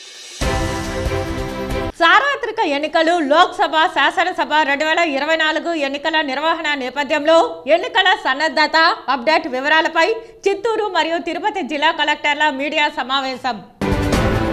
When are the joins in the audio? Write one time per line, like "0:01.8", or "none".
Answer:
0:01.9